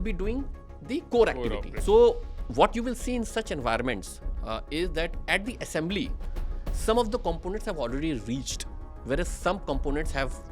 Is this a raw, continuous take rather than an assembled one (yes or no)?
no